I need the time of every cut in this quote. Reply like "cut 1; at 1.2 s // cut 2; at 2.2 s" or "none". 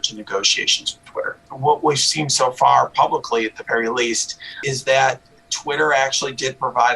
cut 1; at 1.3 s // cut 2; at 4.6 s

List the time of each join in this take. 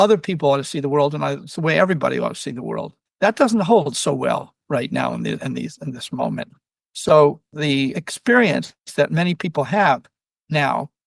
cut 1; at 3.0 s // cut 2; at 7.8 s // cut 3; at 8.8 s

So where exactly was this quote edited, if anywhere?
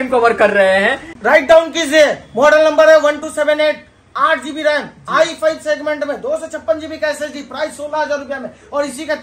cut 1; at 1.1 s

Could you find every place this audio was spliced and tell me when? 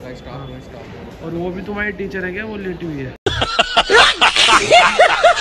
none

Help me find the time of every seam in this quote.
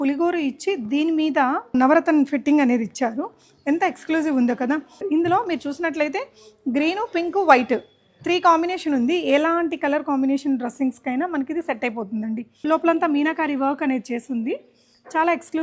cut 1; at 1.7 s // cut 2; at 5.0 s // cut 3; at 12.6 s

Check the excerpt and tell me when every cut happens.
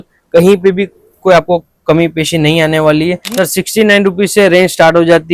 cut 1; at 3.5 s

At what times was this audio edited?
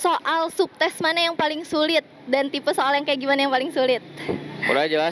none

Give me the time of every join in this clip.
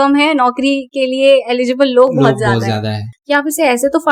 cut 1; at 3.1 s

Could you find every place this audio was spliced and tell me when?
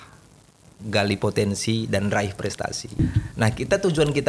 cut 1; at 3.0 s

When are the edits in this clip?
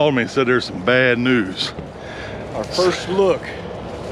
none

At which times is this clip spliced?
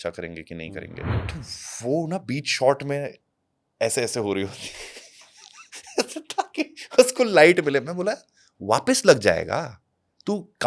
cut 1; at 1.2 s

